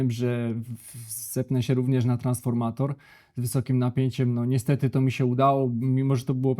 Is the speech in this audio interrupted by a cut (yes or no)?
no